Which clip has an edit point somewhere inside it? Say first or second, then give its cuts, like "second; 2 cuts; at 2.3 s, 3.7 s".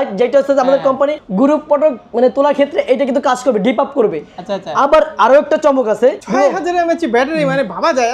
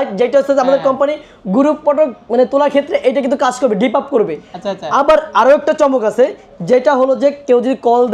first; 2 cuts; at 1.2 s, 6.2 s